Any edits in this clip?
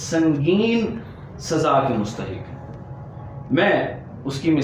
no; 0 cuts

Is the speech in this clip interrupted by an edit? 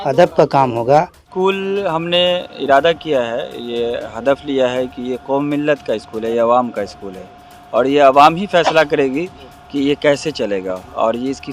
yes; 1 cut; at 1.2 s

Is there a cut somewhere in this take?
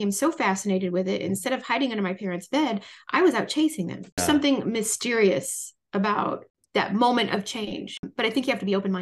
yes; 3 cuts; at 4.2 s, 6.5 s, 8.1 s

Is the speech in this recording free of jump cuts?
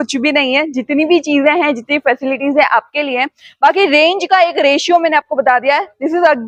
yes; 0 cuts

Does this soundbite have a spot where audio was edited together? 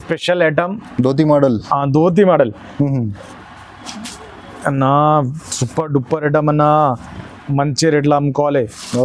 no; 0 cuts

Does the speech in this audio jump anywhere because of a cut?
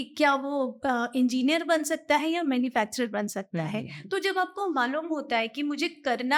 no; 0 cuts

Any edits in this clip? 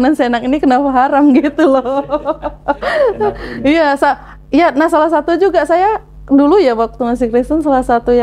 no; 0 cuts

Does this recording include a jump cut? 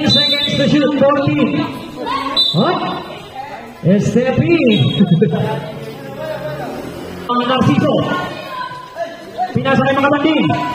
yes; 1 cut; at 7.3 s

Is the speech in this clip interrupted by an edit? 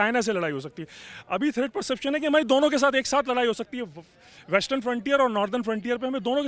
no; 0 cuts

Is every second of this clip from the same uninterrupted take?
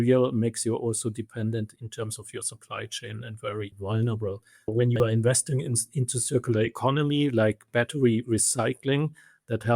no; 3 cuts; at 1.8 s, 3.7 s, 4.7 s

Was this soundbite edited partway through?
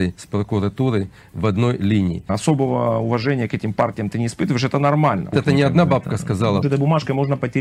yes; 3 cuts; at 2.3 s, 5.3 s, 6.6 s

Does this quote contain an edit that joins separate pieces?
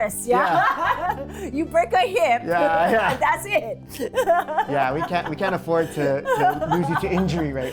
no; 0 cuts

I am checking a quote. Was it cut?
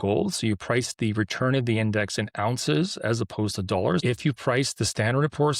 yes; 1 cut; at 4.0 s

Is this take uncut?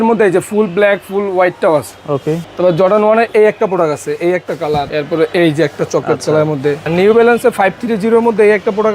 no; 3 cuts; at 2.5 s, 4.9 s, 6.8 s

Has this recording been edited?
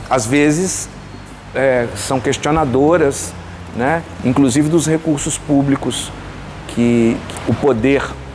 no; 0 cuts

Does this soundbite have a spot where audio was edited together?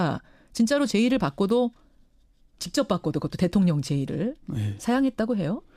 no; 0 cuts

